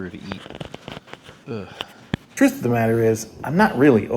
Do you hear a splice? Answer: yes; 1 cut; at 2.3 s

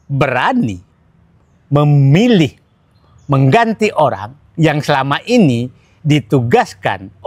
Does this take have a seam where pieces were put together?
no; 0 cuts

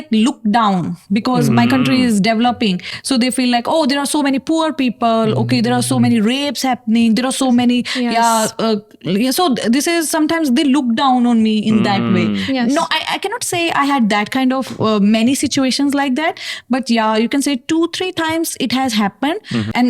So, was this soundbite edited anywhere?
no; 0 cuts

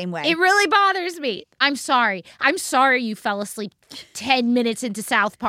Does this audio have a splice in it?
yes; 1 cut; at 1.3 s

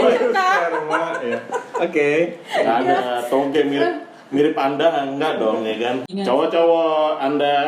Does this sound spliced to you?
yes; 1 cut; at 6.1 s

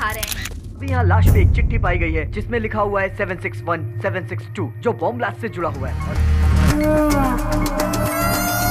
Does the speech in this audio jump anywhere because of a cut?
yes; 2 cuts; at 0.8 s, 5.9 s

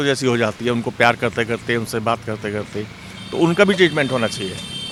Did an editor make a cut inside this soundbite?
no; 0 cuts

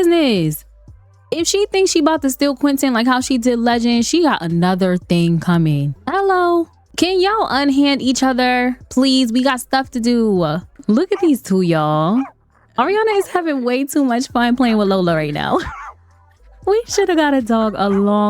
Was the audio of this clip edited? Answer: yes; 3 cuts; at 5.9 s, 6.8 s, 10.7 s

